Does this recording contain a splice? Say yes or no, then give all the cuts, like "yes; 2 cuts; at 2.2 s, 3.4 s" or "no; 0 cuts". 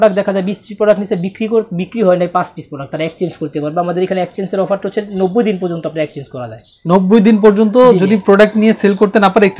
no; 0 cuts